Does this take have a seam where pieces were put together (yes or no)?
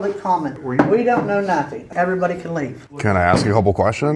no